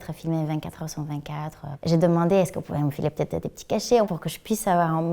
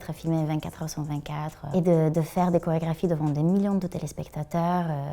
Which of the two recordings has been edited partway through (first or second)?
first